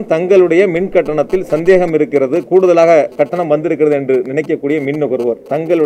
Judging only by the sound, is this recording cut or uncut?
uncut